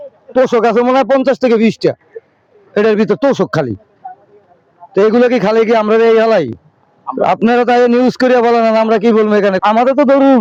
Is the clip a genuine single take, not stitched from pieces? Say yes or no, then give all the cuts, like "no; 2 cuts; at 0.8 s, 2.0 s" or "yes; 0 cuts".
yes; 0 cuts